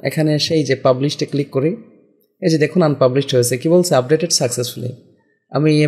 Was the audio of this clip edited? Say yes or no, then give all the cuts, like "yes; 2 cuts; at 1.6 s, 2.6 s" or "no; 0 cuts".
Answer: no; 0 cuts